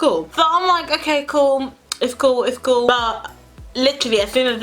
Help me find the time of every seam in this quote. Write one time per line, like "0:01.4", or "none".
0:02.9